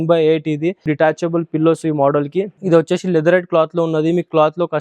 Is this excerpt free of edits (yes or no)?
no